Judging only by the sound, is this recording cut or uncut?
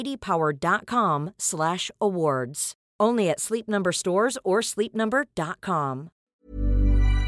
cut